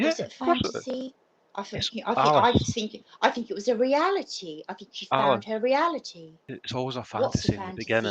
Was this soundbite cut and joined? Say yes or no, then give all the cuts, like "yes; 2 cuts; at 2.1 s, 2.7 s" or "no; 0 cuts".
yes; 1 cut; at 6.5 s